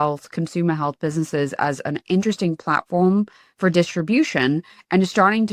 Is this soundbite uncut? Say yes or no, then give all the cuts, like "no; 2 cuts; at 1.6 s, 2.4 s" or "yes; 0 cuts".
yes; 0 cuts